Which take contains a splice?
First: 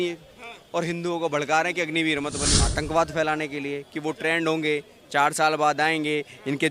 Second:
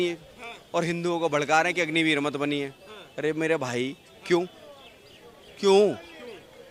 first; 1 cut; at 2.6 s

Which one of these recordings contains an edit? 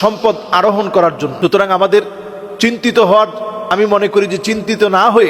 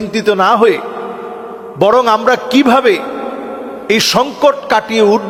first; 2 cuts; at 1.3 s, 3.6 s

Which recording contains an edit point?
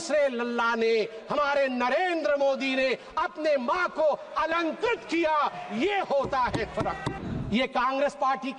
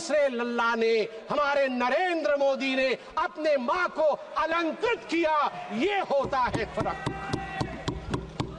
first; 1 cut; at 7.1 s

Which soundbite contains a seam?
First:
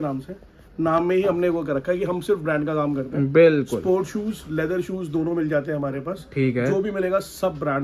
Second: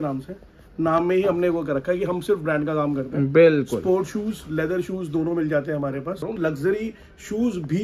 second; 1 cut; at 6.2 s

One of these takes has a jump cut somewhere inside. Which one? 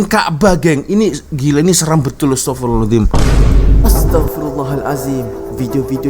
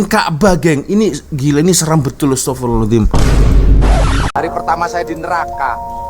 second; 1 cut; at 4.3 s

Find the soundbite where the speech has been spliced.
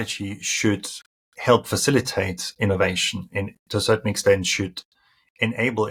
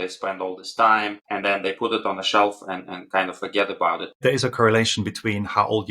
second; 2 cuts; at 1.2 s, 4.2 s

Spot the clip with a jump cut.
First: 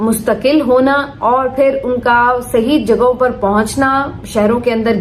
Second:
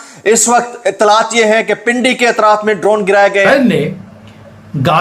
second; 1 cut; at 3.5 s

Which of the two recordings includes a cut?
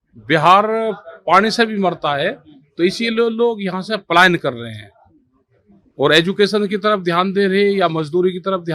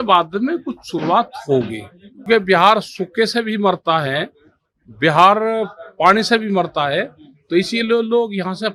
second; 1 cut; at 2.3 s

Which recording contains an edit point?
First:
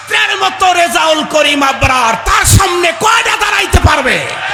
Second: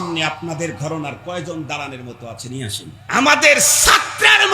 second; 1 cut; at 2.9 s

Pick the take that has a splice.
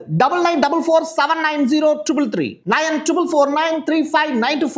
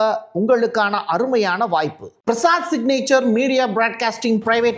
second; 1 cut; at 2.1 s

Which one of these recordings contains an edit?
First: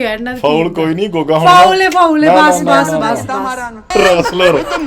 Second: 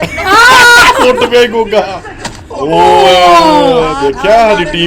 first; 1 cut; at 3.9 s

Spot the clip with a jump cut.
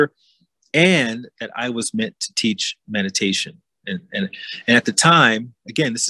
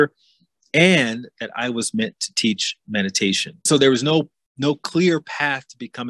second; 1 cut; at 3.6 s

